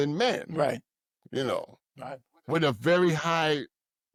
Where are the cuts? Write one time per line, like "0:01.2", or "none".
none